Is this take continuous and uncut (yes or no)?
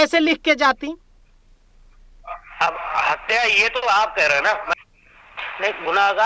no